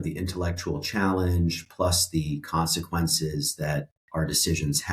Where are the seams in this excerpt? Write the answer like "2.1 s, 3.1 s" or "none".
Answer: 4.0 s